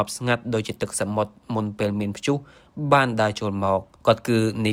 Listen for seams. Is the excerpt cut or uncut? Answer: uncut